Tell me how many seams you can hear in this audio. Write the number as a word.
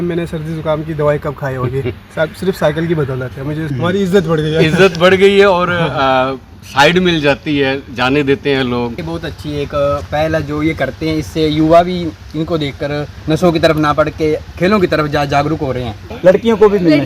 three